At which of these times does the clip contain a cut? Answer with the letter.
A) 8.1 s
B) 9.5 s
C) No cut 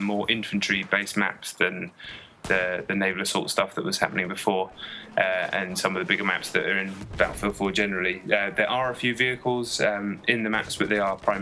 B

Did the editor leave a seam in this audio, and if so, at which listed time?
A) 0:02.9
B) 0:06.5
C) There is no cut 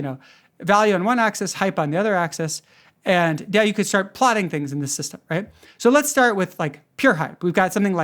C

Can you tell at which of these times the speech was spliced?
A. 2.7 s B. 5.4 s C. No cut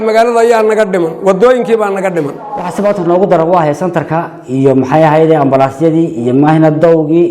A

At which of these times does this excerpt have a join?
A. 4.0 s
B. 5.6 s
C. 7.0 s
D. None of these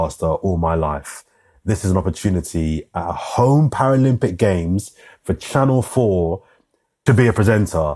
C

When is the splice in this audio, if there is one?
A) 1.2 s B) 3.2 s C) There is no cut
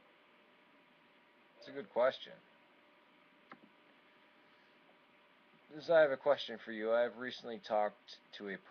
A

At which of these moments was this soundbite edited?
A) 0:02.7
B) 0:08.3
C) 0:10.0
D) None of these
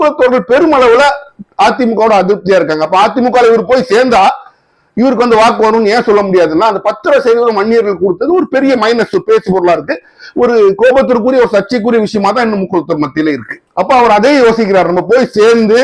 D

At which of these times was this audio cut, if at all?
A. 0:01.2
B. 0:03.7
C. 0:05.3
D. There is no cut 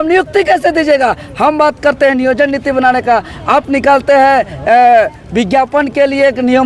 D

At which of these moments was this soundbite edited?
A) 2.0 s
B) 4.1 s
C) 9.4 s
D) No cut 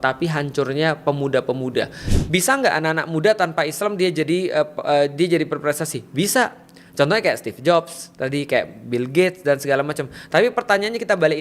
A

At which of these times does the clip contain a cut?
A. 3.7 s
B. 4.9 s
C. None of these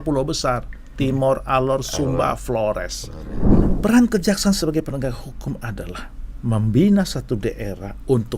A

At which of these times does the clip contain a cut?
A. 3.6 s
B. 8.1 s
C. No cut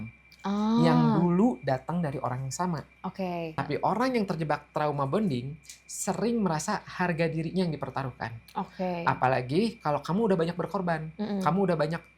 A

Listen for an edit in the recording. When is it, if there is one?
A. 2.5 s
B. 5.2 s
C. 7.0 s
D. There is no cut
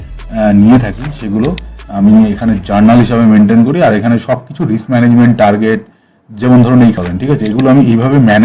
C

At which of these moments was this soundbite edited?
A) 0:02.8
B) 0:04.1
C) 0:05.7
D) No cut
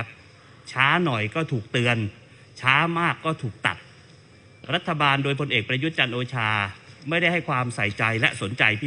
D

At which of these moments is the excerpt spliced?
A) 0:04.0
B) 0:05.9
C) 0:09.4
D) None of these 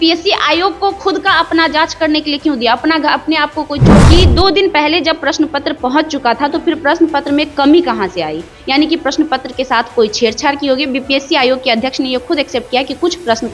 A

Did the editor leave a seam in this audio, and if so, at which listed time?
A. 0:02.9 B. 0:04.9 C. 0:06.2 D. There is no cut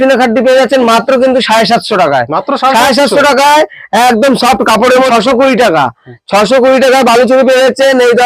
B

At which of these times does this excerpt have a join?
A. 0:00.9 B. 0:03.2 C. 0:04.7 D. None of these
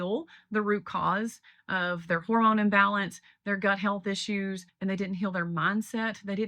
C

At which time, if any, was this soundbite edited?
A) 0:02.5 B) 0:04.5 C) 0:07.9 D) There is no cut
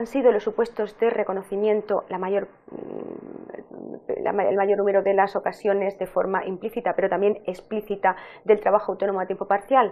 D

